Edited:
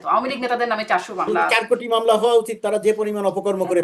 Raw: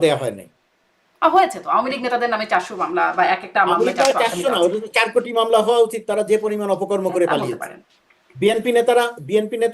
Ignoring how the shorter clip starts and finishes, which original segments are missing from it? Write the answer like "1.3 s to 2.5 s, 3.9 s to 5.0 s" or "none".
3.1 s to 4.9 s